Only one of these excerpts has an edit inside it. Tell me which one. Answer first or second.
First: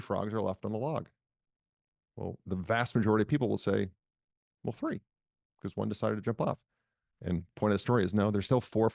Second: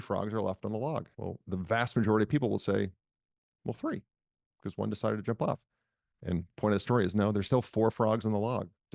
second